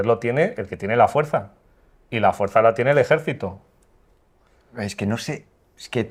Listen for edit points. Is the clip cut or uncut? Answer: uncut